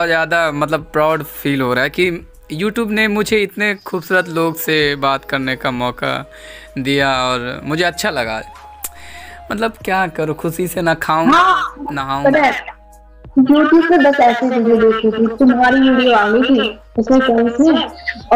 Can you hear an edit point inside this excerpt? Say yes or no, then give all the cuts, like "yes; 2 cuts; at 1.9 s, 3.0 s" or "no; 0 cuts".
no; 0 cuts